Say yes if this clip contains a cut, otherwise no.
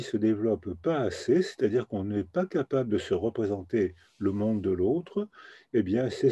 no